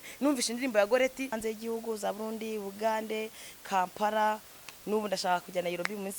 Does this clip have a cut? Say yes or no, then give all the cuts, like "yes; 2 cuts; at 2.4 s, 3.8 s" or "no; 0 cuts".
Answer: yes; 1 cut; at 1.4 s